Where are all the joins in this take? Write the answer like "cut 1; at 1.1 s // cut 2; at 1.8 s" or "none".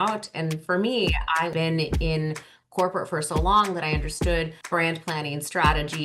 cut 1; at 1.5 s // cut 2; at 4.6 s